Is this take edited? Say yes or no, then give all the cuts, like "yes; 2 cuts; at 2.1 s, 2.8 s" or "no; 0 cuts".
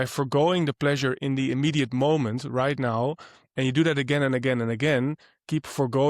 no; 0 cuts